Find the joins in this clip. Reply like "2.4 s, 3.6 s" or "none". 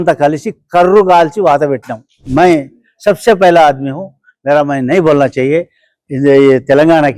2.2 s